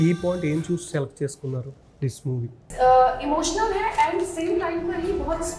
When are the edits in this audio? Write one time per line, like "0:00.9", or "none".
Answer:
0:02.6